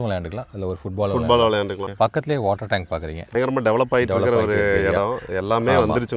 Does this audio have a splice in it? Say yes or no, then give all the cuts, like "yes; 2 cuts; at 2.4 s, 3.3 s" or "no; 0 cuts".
yes; 2 cuts; at 1.8 s, 3.3 s